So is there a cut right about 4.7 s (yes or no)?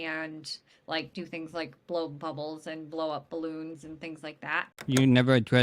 yes